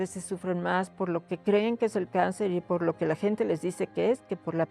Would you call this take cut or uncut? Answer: uncut